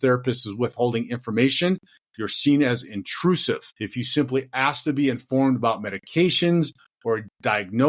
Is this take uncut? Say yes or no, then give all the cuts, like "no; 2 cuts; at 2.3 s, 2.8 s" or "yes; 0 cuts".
no; 1 cut; at 3.8 s